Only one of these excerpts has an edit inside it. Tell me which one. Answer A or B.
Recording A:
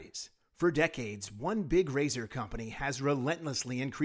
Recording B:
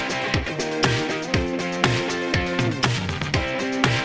B